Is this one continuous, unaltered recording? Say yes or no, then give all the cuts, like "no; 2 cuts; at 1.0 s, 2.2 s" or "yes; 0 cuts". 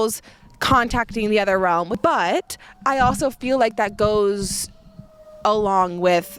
yes; 0 cuts